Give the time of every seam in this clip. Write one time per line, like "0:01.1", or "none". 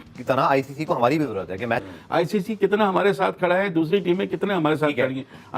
0:01.9

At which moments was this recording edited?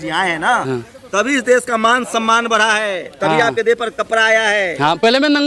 none

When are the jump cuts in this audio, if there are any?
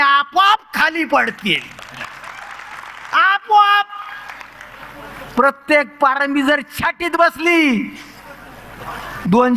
none

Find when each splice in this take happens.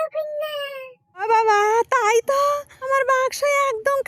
0:00.9
0:02.7

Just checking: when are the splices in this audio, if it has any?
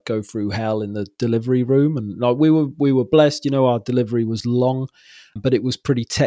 0:05.3

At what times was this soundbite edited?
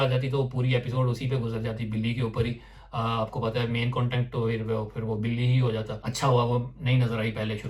0:06.0

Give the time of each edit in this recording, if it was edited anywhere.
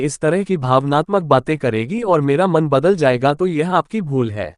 none

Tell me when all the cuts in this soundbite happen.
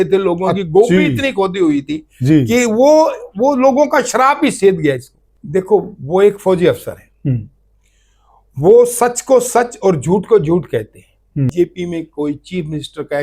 0:05.2
0:11.5

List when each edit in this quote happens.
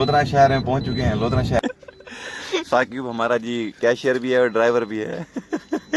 0:01.6

